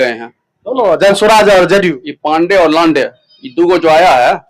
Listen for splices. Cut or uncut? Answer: uncut